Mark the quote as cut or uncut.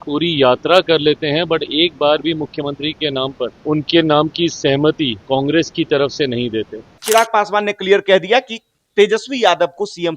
cut